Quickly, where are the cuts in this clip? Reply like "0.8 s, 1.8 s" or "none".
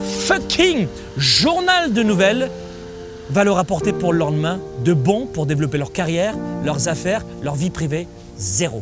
none